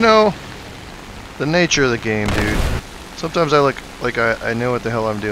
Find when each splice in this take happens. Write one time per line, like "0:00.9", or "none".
0:02.8